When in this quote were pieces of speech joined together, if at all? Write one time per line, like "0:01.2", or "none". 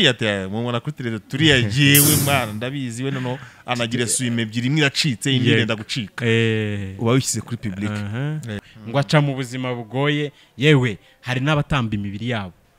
0:08.7